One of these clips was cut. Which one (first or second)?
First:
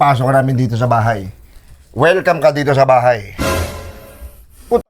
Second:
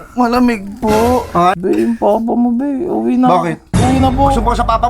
second